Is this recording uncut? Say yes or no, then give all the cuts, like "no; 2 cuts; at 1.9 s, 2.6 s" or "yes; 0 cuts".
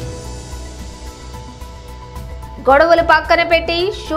no; 1 cut; at 1.1 s